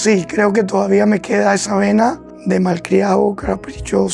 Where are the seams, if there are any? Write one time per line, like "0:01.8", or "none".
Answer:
0:02.3